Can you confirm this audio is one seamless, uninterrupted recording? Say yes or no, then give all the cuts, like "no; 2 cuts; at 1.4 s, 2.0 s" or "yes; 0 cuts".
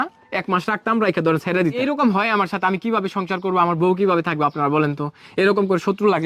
no; 1 cut; at 1.8 s